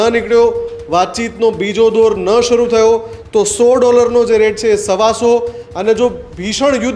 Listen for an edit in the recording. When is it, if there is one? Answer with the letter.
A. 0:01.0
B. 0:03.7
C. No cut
C